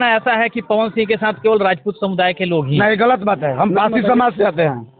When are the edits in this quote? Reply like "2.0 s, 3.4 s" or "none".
none